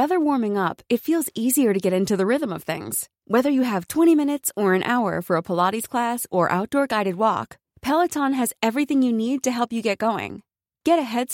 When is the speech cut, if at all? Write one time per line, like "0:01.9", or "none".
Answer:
none